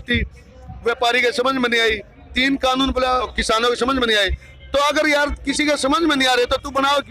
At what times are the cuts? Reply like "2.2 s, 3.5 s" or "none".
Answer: 3.3 s